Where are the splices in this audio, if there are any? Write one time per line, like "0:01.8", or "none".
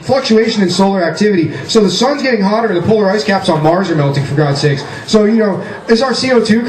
0:02.2